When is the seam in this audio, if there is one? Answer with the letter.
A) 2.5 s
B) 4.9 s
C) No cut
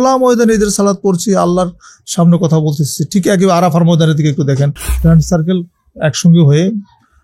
B